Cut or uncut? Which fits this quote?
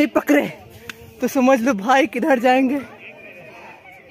uncut